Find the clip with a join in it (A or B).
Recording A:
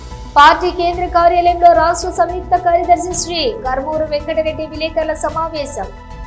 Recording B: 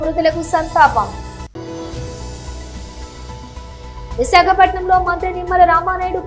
B